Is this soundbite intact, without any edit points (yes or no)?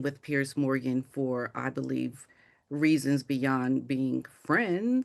yes